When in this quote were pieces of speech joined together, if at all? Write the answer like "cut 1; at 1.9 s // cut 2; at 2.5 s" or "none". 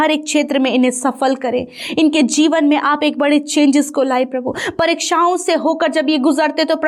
none